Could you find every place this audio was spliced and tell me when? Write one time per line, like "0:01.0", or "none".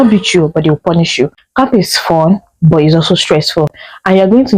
0:01.4